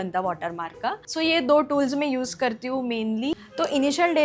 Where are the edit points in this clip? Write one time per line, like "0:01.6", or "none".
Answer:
0:01.1
0:03.3